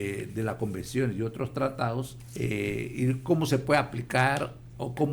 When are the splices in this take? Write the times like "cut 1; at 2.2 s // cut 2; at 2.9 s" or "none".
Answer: cut 1; at 2.2 s